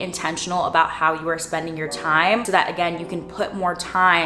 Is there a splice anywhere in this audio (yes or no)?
no